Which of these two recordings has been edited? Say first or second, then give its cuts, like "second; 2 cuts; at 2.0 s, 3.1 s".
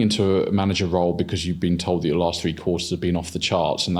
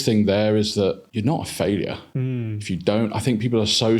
second; 2 cuts; at 1.1 s, 2.1 s